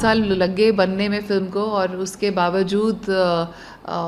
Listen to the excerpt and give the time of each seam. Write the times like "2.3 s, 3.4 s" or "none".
none